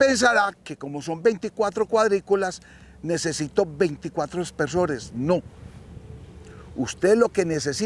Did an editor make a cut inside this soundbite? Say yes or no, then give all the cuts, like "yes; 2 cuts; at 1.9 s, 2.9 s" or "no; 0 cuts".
no; 0 cuts